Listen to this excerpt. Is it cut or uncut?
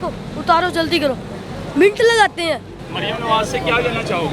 cut